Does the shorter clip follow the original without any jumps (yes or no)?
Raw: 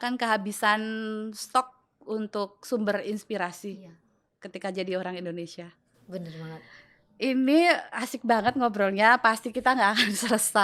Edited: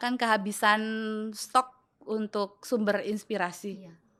yes